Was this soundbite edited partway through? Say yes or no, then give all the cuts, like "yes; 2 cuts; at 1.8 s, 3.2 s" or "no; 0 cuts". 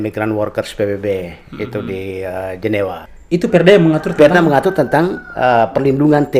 yes; 1 cut; at 3.1 s